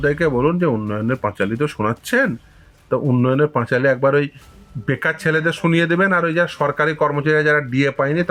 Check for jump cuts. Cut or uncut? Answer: uncut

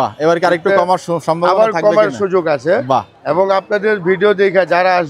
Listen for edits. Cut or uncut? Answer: uncut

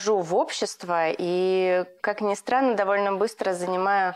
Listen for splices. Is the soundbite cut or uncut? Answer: uncut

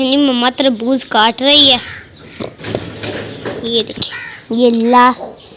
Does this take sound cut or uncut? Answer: uncut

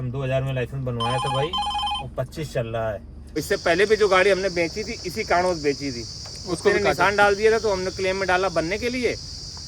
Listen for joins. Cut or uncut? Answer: cut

